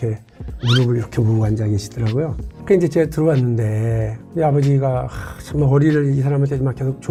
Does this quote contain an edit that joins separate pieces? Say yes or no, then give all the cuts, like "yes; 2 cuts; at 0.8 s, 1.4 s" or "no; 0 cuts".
no; 0 cuts